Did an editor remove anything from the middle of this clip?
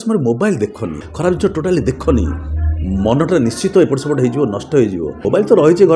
yes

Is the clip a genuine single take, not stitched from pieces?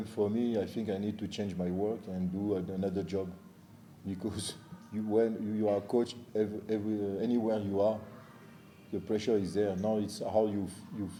yes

